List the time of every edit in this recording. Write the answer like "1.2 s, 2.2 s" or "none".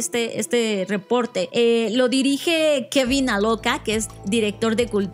1.5 s